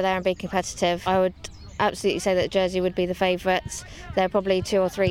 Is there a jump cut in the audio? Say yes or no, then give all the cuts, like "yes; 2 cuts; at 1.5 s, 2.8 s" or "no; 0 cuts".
yes; 1 cut; at 1.0 s